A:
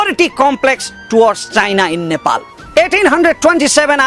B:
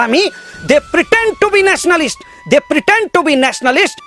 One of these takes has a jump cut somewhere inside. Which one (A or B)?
A